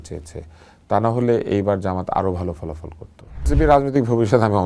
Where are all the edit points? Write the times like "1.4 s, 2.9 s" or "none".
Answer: 3.5 s